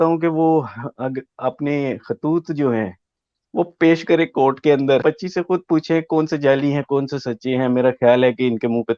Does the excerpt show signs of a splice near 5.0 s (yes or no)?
yes